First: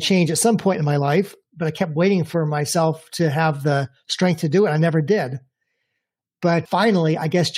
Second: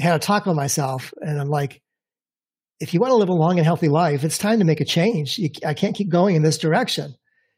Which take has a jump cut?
first; 2 cuts; at 1.4 s, 6.7 s

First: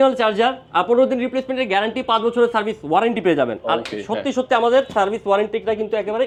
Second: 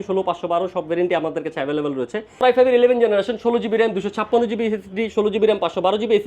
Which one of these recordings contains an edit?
second; 1 cut; at 2.4 s

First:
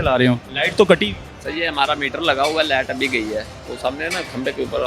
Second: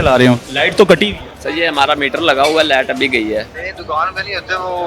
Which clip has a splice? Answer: second; 1 cut; at 3.6 s

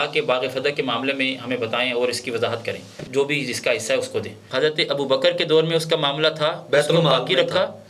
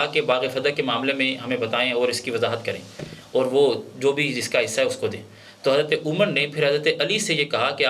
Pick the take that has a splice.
first; 2 cuts; at 3.0 s, 4.4 s

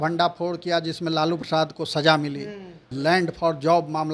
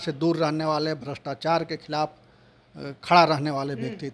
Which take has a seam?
first; 1 cut; at 2.8 s

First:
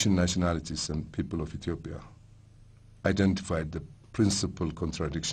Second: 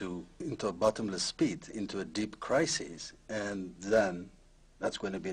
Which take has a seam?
second; 1 cut; at 3.7 s

